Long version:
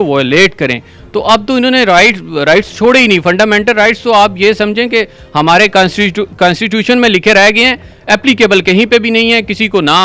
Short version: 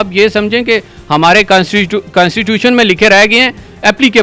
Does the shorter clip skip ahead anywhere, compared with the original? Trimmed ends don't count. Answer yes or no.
no